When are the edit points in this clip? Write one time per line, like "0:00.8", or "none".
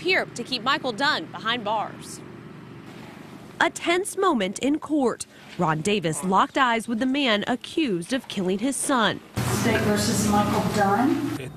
0:07.8